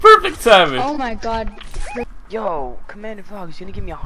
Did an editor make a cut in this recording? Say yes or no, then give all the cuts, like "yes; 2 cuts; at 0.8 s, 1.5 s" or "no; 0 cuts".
yes; 1 cut; at 2.1 s